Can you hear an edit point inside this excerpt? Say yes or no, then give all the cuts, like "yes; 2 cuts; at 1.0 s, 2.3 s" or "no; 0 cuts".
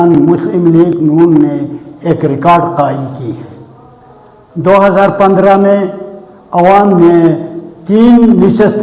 no; 0 cuts